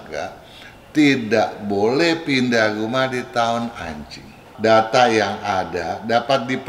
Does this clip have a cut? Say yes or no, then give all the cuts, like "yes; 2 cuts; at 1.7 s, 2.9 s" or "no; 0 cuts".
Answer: yes; 1 cut; at 4.5 s